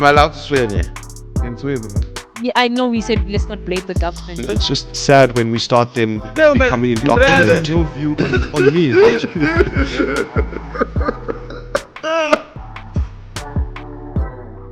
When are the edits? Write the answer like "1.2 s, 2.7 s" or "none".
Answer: 12.6 s